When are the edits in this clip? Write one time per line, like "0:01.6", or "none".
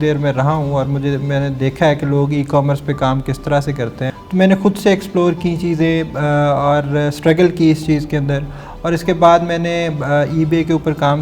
0:04.0